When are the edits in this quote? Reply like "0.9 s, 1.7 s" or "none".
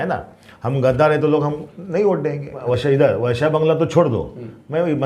2.8 s